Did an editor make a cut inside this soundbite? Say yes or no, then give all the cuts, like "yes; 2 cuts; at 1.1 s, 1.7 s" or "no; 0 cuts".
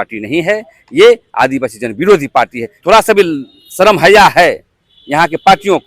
yes; 1 cut; at 2.7 s